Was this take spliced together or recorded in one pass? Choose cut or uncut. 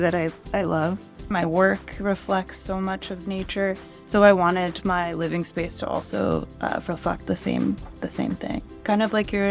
cut